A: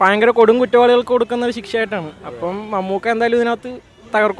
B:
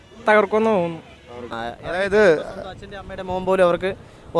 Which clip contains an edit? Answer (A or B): B